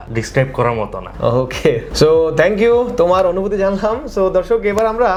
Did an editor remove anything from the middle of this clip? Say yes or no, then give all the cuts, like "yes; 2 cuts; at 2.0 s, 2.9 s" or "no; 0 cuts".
no; 0 cuts